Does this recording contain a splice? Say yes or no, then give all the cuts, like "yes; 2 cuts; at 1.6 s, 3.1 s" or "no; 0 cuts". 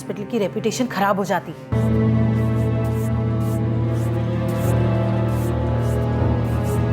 yes; 1 cut; at 1.7 s